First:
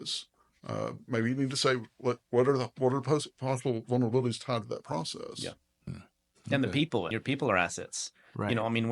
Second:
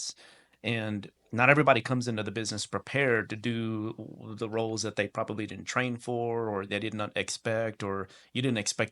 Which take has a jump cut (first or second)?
first